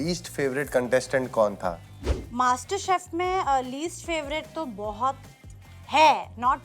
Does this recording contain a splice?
no; 0 cuts

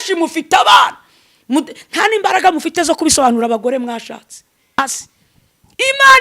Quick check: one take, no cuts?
no; 1 cut; at 4.8 s

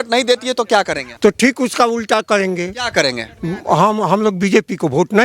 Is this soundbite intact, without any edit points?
no; 1 cut; at 1.0 s

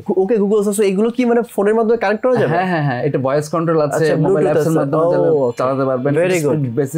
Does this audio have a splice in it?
no; 0 cuts

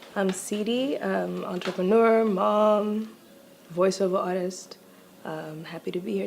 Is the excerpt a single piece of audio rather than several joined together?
no; 1 cut; at 5.3 s

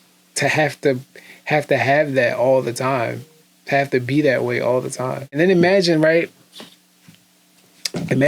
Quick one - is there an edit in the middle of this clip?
yes; 1 cut; at 5.2 s

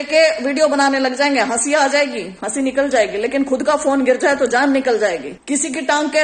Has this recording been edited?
yes; 1 cut; at 5.3 s

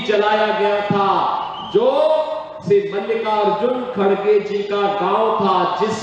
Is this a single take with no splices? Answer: yes; 0 cuts

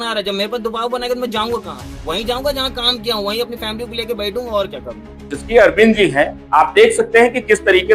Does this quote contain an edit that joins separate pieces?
yes; 1 cut; at 5.4 s

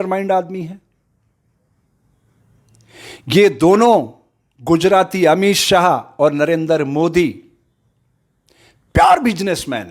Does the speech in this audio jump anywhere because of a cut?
no; 0 cuts

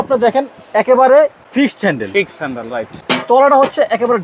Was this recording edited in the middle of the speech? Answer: yes; 2 cuts; at 1.4 s, 3.0 s

